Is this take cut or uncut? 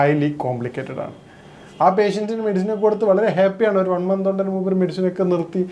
uncut